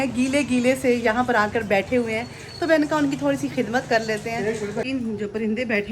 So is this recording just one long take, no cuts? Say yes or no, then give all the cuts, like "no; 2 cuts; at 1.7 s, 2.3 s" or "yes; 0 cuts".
no; 1 cut; at 4.8 s